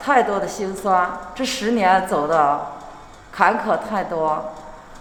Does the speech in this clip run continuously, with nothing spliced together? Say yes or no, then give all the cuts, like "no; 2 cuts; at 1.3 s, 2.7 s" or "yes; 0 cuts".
yes; 0 cuts